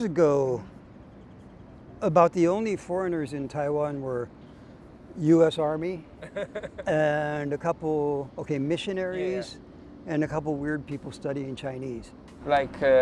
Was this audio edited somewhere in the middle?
no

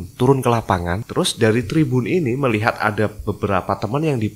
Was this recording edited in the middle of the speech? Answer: yes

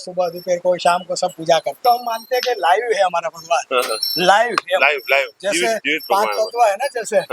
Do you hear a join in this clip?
yes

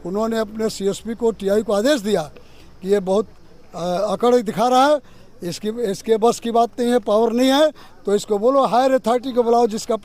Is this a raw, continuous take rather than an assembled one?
yes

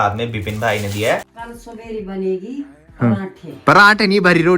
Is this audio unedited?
no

